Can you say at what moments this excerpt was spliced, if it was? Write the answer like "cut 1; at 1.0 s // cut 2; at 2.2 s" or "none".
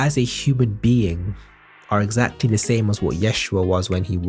none